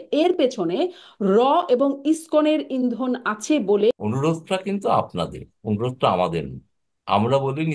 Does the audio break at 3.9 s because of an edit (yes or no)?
yes